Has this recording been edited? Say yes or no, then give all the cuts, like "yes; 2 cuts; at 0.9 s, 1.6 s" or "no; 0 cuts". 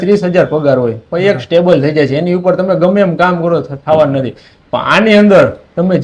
no; 0 cuts